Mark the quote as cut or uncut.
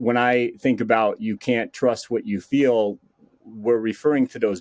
uncut